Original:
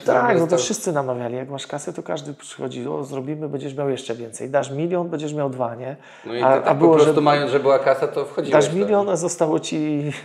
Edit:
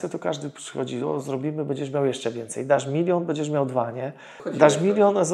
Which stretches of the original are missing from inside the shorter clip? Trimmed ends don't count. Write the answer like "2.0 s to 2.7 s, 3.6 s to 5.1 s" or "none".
6.2 s to 8.3 s